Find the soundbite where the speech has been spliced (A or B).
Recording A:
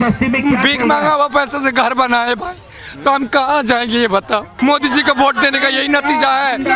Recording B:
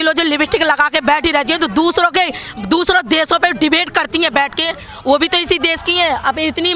A